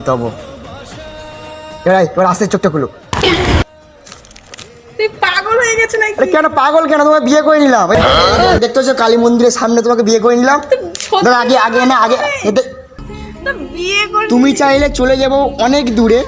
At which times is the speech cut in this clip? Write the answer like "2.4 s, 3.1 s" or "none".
13.0 s